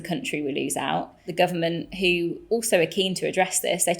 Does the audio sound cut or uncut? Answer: cut